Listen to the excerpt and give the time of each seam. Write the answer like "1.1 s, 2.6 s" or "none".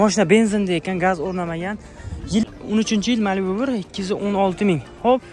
2.4 s